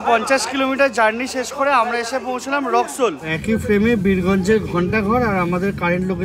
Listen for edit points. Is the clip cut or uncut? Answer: cut